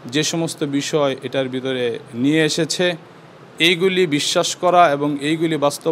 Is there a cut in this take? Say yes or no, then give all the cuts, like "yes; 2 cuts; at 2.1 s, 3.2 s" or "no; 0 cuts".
no; 0 cuts